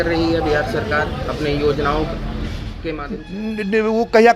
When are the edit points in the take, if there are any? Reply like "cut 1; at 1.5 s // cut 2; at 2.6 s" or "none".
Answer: none